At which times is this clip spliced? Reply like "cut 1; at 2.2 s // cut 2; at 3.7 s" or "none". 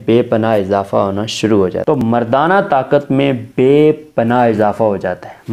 cut 1; at 1.9 s

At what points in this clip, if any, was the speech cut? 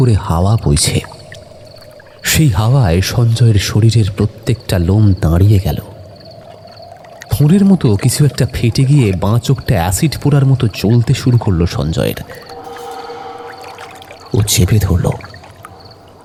none

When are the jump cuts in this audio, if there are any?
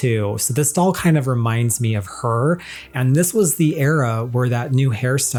none

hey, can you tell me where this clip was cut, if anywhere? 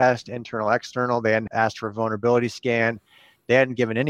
cut 1; at 1.5 s

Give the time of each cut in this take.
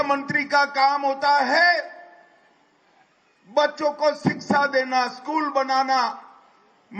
cut 1; at 1.5 s

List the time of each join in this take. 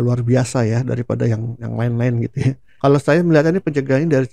cut 1; at 2.7 s

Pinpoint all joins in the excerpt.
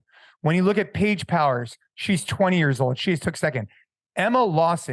none

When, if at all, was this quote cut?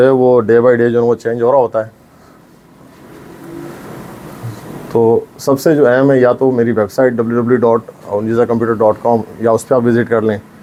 none

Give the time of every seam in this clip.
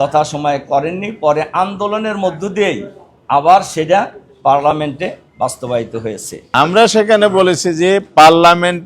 cut 1; at 6.4 s

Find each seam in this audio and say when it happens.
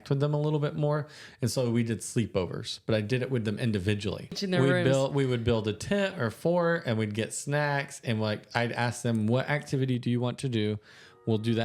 cut 1; at 4.4 s

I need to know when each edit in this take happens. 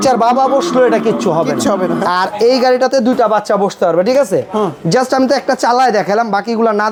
none

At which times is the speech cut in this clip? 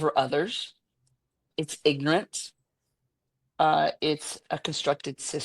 cut 1; at 1.5 s

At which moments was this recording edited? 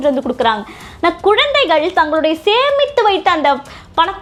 none

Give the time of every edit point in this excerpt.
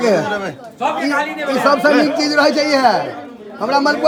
none

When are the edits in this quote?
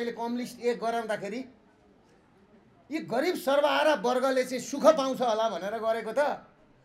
none

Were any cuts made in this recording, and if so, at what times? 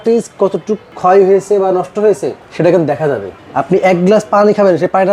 cut 1; at 0.9 s // cut 2; at 3.4 s

